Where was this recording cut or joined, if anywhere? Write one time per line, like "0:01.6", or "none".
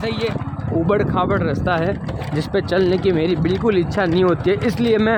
none